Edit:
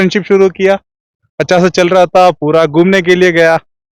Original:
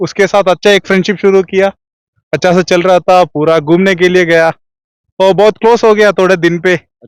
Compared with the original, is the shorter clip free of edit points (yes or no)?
yes